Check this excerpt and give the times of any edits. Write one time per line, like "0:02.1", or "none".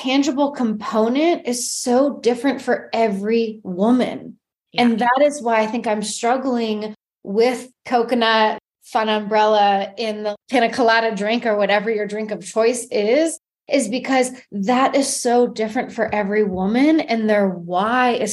none